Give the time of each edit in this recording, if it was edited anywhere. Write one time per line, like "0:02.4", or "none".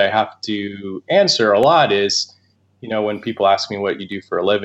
none